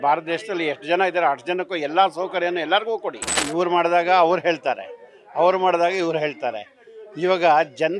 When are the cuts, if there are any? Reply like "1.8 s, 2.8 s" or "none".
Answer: 3.4 s